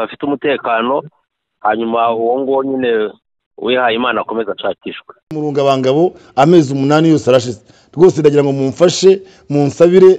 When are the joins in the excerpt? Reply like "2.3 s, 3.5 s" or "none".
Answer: 5.3 s